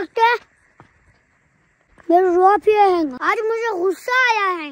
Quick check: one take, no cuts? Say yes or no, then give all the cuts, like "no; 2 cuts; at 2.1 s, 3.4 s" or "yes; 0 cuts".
no; 2 cuts; at 1.9 s, 3.2 s